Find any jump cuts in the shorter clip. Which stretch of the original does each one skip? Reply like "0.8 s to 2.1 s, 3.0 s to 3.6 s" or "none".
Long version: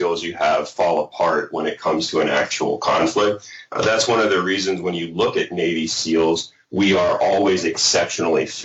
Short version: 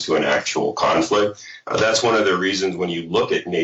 none